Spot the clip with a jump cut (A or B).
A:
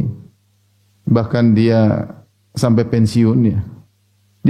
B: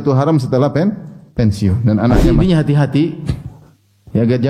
B